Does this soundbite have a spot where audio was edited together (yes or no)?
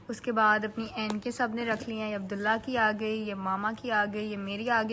no